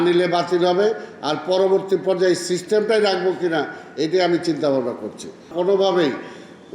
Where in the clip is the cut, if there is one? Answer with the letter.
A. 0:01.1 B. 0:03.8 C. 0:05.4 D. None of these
C